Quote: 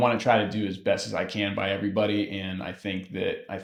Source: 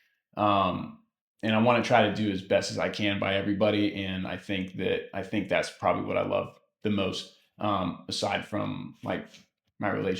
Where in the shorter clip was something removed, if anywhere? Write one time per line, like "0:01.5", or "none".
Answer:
none